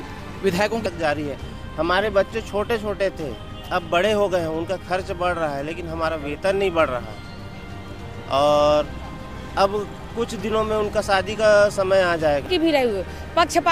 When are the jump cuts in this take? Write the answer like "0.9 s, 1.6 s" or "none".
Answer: 0.8 s, 12.5 s